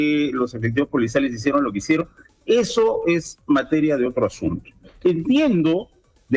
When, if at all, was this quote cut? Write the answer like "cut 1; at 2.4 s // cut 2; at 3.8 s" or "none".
none